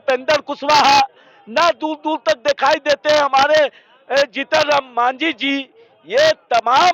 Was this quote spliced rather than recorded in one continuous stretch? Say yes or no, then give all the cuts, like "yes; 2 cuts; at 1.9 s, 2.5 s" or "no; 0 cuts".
no; 0 cuts